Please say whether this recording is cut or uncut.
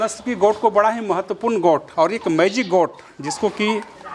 uncut